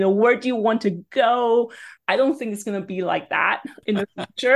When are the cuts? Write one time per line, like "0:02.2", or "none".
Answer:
0:01.8
0:03.7